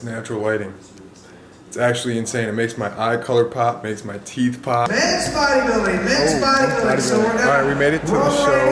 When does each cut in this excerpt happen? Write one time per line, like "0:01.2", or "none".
0:04.9

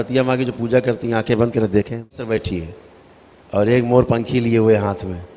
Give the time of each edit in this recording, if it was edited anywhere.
0:02.3

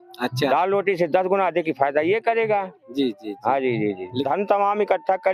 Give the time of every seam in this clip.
0:04.2

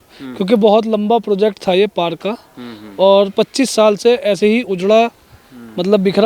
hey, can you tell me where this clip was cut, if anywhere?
none

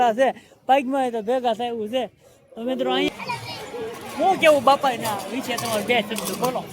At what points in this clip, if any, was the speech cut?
0:03.1

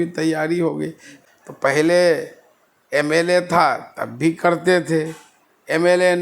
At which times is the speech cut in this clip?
0:01.1

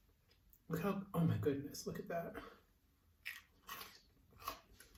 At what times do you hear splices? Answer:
none

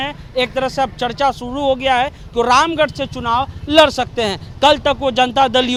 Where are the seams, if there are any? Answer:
none

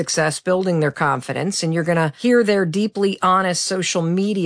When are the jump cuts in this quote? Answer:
0:02.1

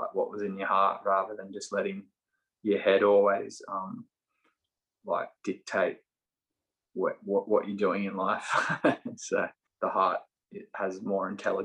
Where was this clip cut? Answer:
0:09.6

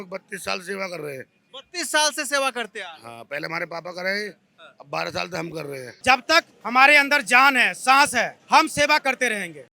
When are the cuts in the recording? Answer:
0:05.9
0:08.4

